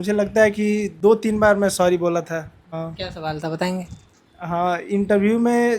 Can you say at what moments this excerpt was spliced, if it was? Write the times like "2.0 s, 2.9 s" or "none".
0.9 s, 2.6 s